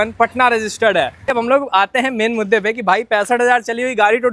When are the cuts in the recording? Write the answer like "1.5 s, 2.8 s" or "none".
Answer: 1.3 s